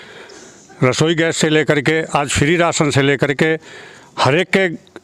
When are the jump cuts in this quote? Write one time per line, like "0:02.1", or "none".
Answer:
none